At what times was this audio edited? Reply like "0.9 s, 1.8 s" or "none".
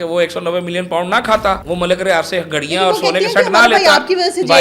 1.6 s